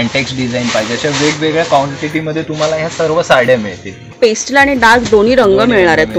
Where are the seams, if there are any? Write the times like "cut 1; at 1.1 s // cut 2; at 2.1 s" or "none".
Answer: cut 1; at 4.2 s